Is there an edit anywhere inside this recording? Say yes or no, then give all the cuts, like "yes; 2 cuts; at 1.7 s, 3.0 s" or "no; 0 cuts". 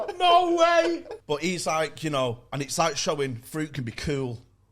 yes; 1 cut; at 1.1 s